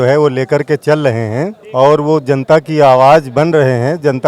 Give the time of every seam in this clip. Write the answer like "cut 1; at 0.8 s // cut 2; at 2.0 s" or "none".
cut 1; at 1.6 s